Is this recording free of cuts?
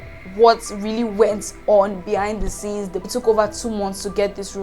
no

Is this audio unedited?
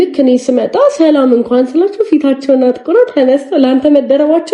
yes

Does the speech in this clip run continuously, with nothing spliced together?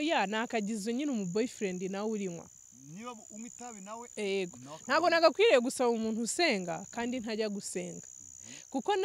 yes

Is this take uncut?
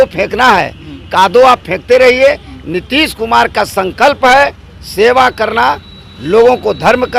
yes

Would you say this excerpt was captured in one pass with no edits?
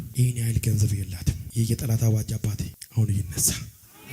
no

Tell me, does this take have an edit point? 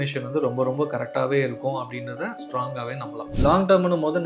yes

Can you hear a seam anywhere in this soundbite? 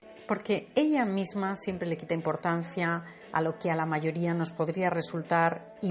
yes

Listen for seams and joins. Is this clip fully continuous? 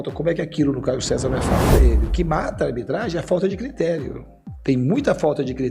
no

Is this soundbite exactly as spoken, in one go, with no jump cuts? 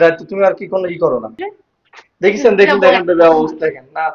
no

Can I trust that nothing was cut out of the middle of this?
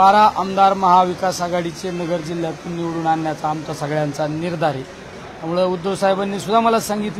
yes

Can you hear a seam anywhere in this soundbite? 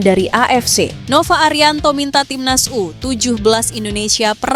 yes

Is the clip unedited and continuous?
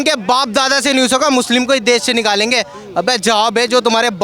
yes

